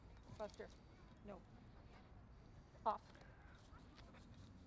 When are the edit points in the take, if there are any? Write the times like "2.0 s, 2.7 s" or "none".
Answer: 3.7 s